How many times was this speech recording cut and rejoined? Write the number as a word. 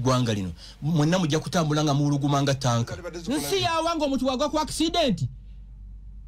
one